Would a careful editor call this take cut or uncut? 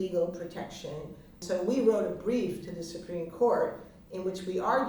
cut